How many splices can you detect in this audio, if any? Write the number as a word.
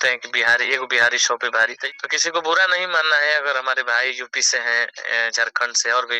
one